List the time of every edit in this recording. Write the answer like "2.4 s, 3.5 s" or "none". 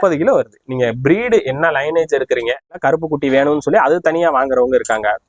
2.8 s